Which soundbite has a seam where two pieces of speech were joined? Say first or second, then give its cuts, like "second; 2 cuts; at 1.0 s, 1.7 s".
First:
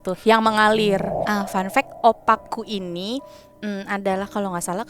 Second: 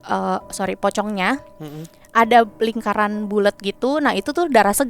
first; 1 cut; at 1.2 s